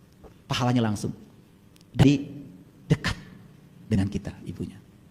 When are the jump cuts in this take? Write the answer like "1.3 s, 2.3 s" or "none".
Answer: 2.0 s